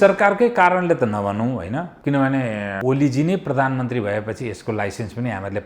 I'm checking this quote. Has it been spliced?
yes; 2 cuts; at 1.9 s, 2.8 s

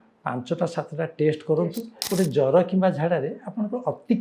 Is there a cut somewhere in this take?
yes; 1 cut; at 1.9 s

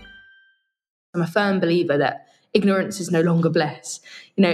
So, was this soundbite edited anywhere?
yes; 1 cut; at 1.0 s

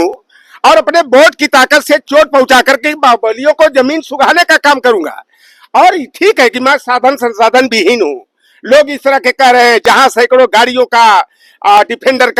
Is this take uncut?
yes; 0 cuts

